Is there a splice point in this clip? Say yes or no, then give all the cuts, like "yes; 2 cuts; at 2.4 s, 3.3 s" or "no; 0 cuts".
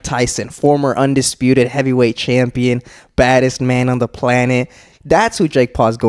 no; 0 cuts